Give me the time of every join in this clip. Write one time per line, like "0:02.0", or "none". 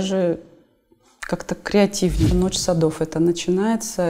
0:02.3